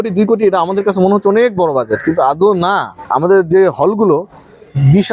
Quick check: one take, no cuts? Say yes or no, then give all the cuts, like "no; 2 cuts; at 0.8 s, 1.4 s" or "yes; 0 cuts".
no; 1 cut; at 2.9 s